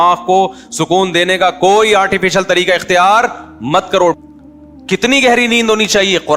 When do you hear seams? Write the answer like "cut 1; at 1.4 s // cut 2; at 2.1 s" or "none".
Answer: cut 1; at 4.2 s

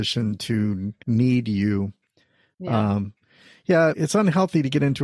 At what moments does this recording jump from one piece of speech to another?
cut 1; at 0.9 s // cut 2; at 4.0 s

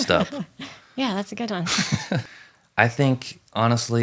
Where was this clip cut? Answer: cut 1; at 2.2 s

